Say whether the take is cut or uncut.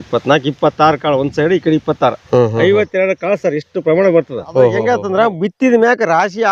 cut